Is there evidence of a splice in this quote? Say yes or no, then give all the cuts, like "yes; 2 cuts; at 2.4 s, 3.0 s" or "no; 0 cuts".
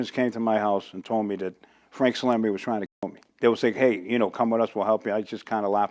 no; 0 cuts